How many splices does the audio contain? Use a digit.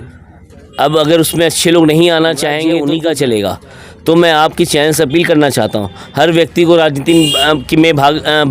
1